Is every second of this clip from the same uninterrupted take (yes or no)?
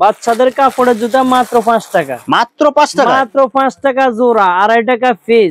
yes